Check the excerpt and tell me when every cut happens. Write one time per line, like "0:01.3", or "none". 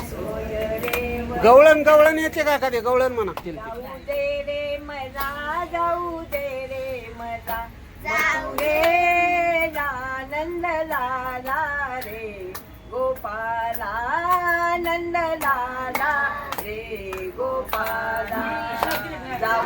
0:03.4